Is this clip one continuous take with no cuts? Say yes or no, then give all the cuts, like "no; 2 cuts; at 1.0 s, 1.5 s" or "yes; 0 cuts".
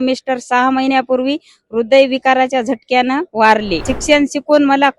no; 1 cut; at 3.9 s